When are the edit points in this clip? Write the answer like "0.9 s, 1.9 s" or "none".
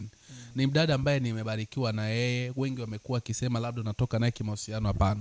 none